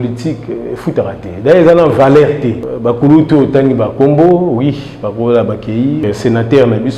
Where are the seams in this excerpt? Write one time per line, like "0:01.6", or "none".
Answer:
0:02.7
0:06.0